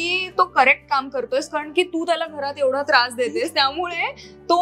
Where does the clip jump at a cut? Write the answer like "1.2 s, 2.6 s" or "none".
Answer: none